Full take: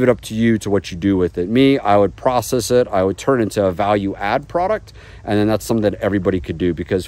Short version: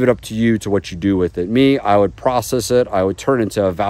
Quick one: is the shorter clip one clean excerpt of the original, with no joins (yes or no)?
yes